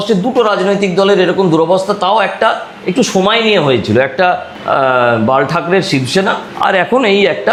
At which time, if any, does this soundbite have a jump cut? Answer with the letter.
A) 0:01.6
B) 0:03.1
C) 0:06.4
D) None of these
D